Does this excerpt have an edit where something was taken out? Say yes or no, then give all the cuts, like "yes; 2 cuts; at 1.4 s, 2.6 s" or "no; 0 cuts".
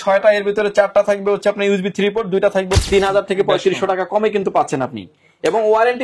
yes; 1 cut; at 2.8 s